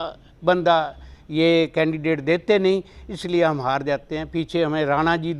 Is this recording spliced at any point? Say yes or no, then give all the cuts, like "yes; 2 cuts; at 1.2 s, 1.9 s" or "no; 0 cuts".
no; 0 cuts